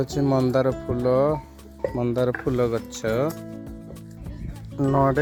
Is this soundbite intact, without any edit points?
yes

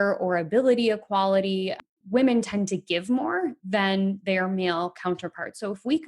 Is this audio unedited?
no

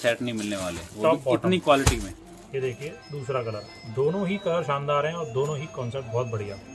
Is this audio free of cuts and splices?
yes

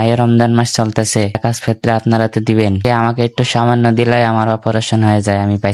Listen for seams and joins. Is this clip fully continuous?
no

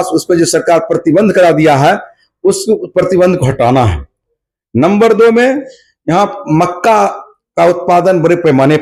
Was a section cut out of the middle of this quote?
no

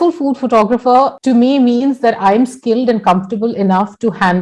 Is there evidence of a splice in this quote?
yes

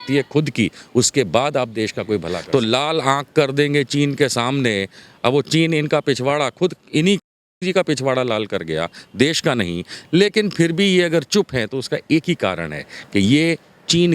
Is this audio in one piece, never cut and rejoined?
no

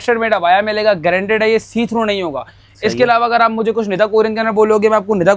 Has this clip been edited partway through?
no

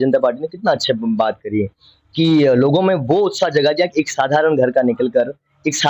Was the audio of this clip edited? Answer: no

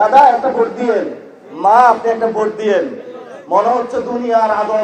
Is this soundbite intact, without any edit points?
yes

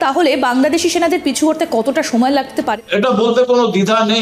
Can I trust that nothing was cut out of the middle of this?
no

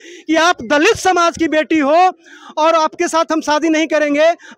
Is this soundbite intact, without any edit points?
yes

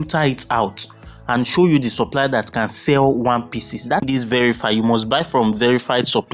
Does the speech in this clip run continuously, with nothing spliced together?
no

